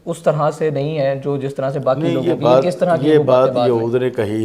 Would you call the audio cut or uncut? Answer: uncut